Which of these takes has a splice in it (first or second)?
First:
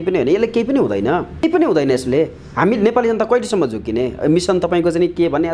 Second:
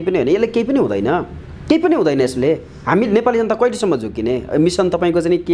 first